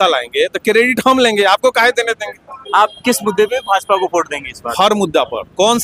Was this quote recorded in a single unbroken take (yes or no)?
yes